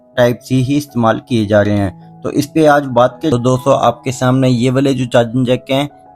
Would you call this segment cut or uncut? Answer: cut